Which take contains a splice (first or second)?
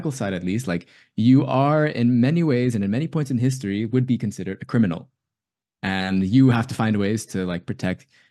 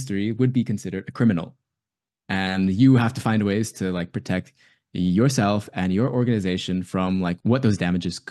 second